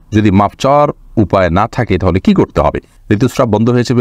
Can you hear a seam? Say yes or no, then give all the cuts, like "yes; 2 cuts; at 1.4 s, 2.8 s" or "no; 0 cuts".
yes; 1 cut; at 2.9 s